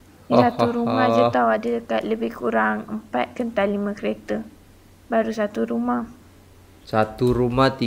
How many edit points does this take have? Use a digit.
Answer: 0